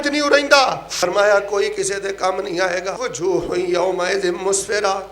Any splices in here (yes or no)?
yes